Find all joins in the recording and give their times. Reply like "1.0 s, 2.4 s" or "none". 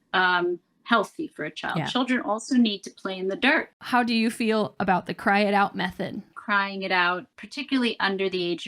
3.7 s, 6.4 s, 7.4 s